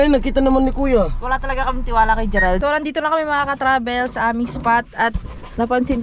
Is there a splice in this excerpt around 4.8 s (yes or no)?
no